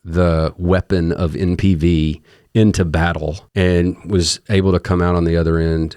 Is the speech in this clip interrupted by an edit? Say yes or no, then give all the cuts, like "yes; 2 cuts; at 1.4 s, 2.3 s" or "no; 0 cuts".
yes; 1 cut; at 3.4 s